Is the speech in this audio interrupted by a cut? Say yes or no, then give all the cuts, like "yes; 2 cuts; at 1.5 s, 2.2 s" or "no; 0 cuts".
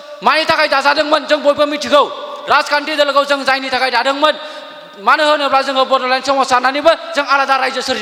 no; 0 cuts